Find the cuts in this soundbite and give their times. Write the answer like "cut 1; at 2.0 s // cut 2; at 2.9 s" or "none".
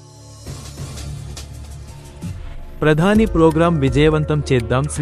cut 1; at 1.1 s // cut 2; at 2.0 s